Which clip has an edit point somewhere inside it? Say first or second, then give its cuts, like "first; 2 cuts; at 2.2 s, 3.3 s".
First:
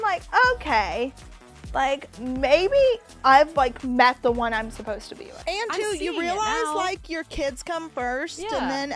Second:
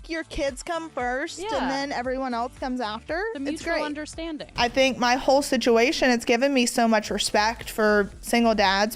first; 1 cut; at 5.3 s